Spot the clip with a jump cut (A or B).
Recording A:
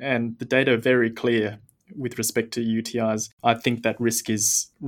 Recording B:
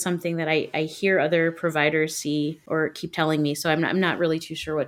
B